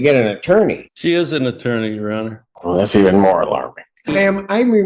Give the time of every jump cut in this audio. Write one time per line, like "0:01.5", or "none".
0:00.9
0:02.5
0:04.1